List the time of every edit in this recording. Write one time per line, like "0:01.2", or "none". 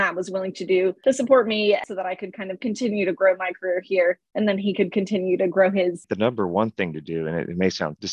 0:01.0
0:01.8
0:06.1